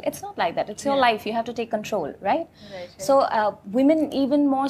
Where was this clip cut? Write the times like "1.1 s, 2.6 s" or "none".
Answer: none